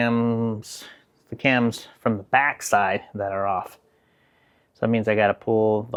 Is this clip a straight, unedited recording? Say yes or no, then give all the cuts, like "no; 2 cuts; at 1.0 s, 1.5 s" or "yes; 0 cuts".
yes; 0 cuts